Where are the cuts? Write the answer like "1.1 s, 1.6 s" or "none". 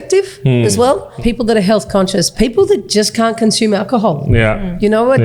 1.1 s, 2.3 s